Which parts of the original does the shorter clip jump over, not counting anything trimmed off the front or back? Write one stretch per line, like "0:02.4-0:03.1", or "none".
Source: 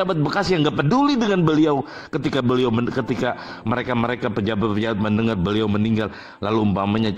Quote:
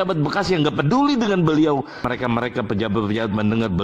0:02.0-0:03.6